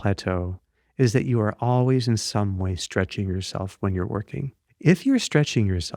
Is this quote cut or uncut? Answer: cut